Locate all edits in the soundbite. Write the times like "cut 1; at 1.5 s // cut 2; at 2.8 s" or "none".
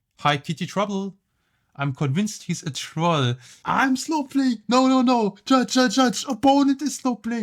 cut 1; at 3.5 s